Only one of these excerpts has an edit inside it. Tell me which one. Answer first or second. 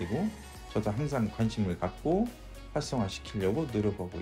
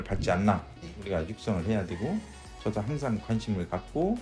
second